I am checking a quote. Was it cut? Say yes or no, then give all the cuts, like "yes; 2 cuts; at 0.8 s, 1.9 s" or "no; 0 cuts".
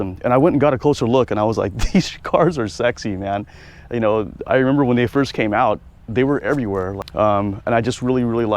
yes; 1 cut; at 7.0 s